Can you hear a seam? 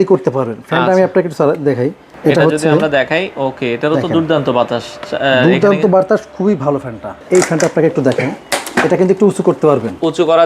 yes; 2 cuts; at 2.1 s, 7.1 s

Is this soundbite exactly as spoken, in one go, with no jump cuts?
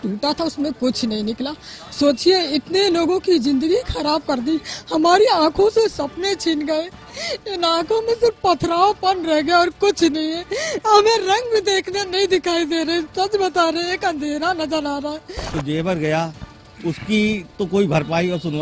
no; 1 cut; at 15.5 s

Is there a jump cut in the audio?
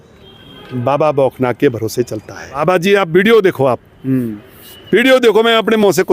yes; 1 cut; at 2.4 s

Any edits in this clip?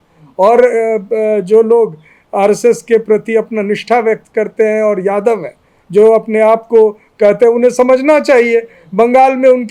no; 0 cuts

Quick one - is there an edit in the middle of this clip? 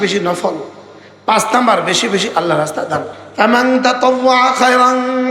yes; 1 cut; at 3.1 s

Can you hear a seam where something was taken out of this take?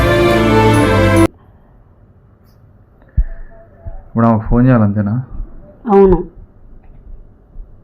no; 0 cuts

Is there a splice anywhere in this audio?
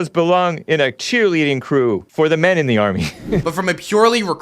yes; 2 cuts; at 2.1 s, 3.4 s

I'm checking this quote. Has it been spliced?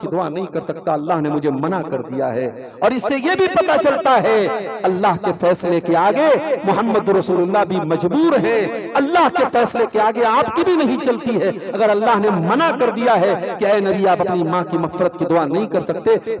no; 0 cuts

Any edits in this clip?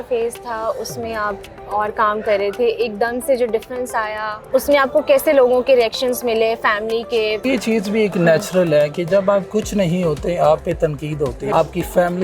yes; 3 cuts; at 4.3 s, 7.4 s, 11.4 s

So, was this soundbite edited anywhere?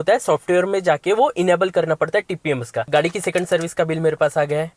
yes; 1 cut; at 2.9 s

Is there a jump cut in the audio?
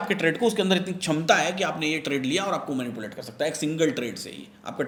no; 0 cuts

